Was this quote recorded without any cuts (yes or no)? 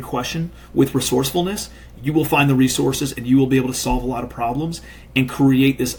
yes